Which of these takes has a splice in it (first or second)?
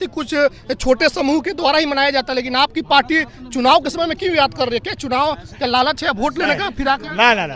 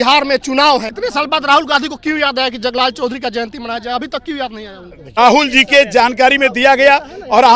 second